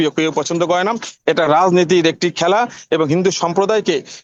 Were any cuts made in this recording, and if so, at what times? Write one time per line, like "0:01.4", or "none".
none